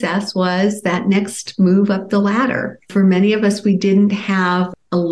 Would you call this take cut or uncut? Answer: cut